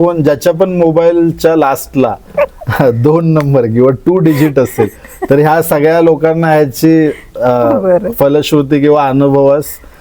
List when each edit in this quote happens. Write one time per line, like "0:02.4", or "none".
none